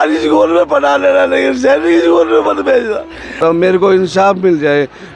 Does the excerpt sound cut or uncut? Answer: cut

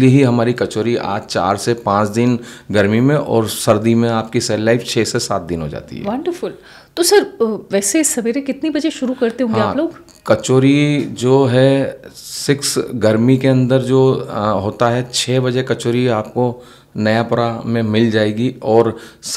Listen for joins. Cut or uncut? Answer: uncut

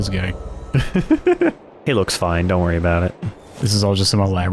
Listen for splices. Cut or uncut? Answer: cut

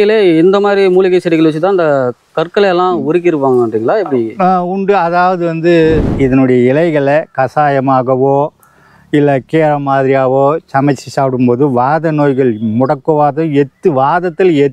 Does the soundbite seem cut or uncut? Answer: cut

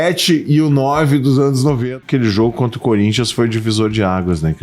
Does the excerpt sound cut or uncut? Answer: cut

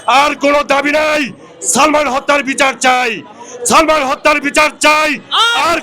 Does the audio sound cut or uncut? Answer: uncut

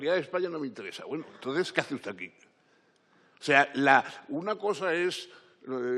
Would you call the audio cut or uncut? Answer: uncut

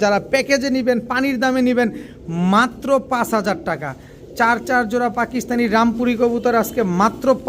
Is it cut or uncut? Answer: uncut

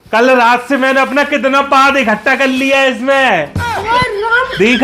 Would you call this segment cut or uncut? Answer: cut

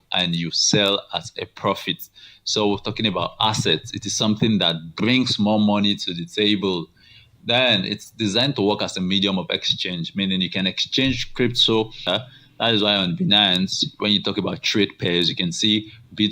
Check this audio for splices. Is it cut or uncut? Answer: cut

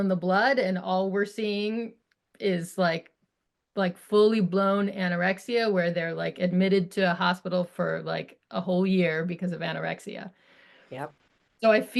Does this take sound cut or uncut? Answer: uncut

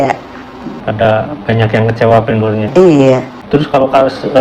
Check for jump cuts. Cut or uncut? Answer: cut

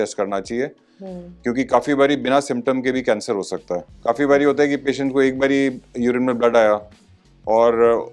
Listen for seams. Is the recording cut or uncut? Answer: cut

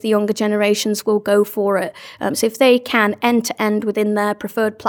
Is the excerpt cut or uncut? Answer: uncut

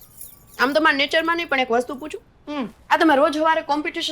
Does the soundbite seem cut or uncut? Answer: cut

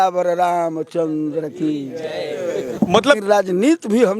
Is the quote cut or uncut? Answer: cut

